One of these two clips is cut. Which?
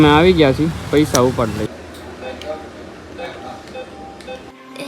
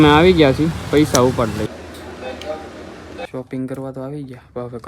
second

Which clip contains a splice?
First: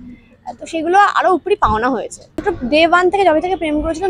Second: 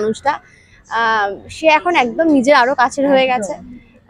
first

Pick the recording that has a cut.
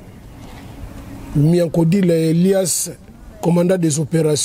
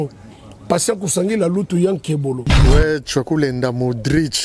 second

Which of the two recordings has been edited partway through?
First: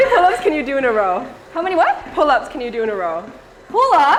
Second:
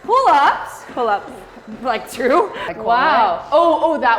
second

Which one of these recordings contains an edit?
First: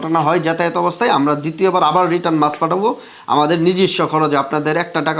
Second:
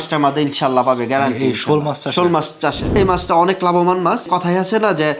second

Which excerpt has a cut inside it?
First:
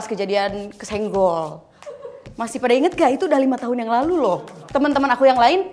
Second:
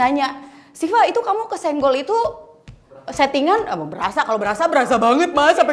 first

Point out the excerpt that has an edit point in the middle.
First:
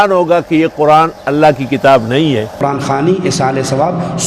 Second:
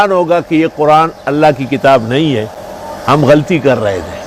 first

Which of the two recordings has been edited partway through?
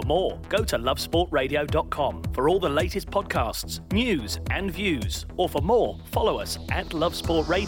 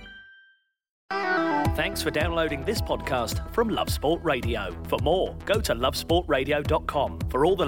second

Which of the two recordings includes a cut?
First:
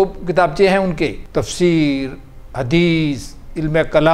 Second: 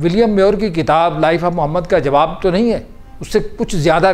first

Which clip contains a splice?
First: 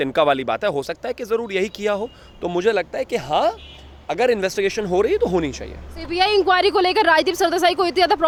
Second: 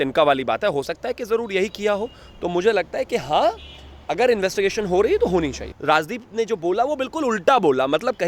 second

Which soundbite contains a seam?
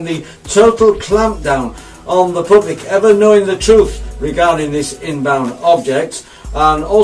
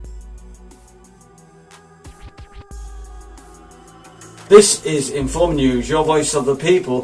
first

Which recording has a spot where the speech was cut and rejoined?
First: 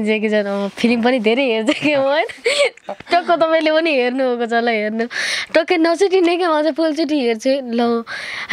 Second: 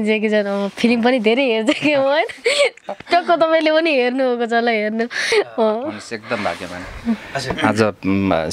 second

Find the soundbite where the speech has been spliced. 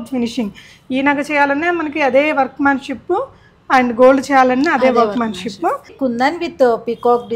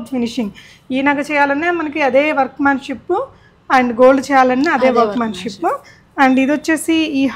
first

